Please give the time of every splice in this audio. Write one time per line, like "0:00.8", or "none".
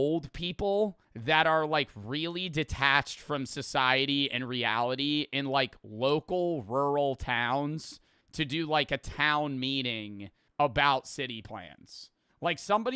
none